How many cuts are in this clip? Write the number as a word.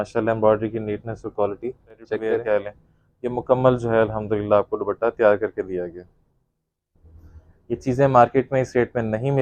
one